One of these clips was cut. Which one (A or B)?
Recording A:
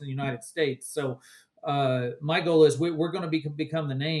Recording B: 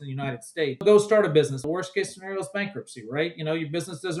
B